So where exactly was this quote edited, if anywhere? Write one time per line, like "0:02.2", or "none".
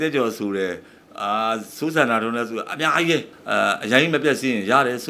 0:03.4